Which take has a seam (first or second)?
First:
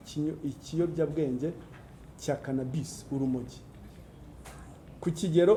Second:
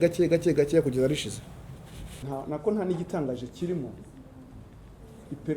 second